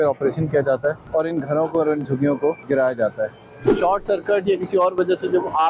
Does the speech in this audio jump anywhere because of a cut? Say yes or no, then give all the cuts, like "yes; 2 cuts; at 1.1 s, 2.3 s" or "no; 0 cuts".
yes; 3 cuts; at 1.0 s, 2.6 s, 3.8 s